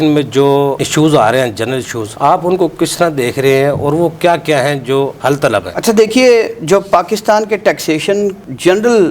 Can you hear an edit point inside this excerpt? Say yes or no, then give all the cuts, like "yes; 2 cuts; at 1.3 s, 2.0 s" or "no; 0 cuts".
no; 0 cuts